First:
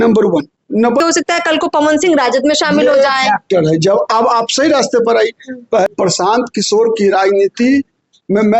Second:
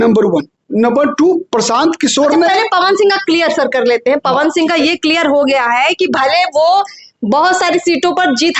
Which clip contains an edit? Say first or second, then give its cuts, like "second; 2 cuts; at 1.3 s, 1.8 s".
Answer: first; 2 cuts; at 1.0 s, 5.9 s